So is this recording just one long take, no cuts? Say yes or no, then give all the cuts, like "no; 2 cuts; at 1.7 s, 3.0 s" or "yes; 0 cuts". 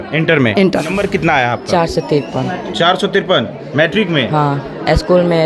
no; 1 cut; at 1.0 s